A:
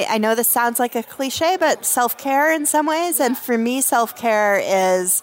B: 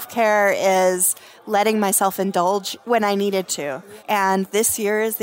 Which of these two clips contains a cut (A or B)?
B